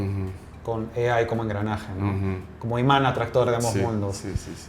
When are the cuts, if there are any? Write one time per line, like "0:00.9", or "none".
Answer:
none